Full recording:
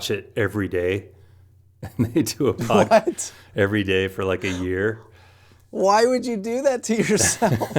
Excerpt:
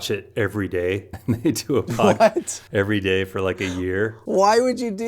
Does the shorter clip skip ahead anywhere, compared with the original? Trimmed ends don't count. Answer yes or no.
yes